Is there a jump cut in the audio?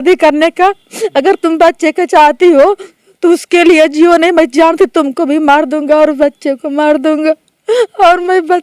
no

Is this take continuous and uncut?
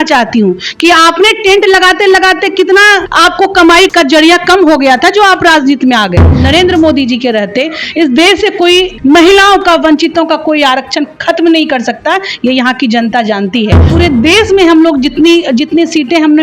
no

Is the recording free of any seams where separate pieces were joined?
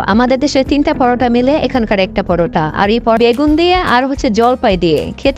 no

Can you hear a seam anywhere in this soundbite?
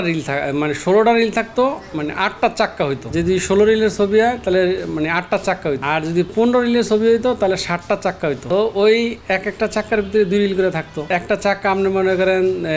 yes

